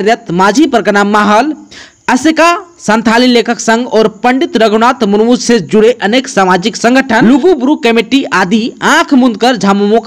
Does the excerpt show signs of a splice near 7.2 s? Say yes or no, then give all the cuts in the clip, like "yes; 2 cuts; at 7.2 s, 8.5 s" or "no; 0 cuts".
yes; 1 cut; at 7.2 s